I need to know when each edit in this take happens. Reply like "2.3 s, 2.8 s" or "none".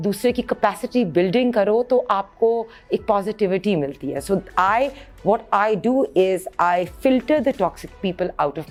none